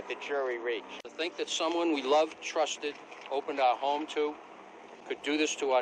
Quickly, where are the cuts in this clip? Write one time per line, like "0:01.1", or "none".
0:01.2